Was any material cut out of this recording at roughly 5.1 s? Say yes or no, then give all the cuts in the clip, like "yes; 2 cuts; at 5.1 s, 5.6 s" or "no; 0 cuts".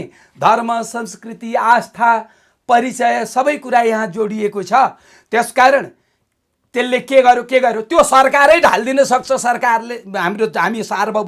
no; 0 cuts